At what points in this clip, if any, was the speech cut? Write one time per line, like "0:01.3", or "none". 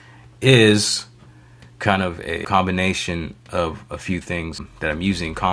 0:02.4
0:04.6